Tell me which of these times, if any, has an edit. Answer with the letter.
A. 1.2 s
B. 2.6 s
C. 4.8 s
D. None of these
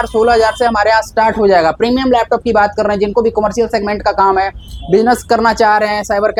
D